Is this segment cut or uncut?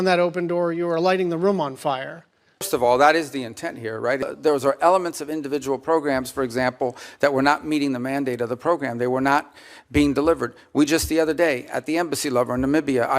cut